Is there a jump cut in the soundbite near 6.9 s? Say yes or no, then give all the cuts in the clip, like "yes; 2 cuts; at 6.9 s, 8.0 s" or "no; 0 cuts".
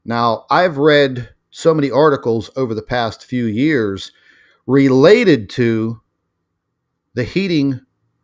no; 0 cuts